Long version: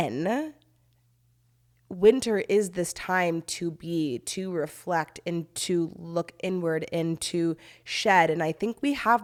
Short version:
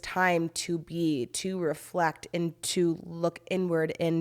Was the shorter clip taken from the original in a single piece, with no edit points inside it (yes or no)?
yes